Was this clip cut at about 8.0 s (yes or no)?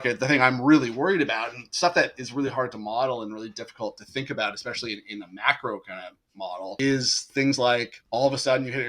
yes